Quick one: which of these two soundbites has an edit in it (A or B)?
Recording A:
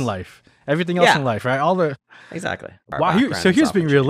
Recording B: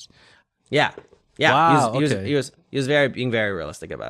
A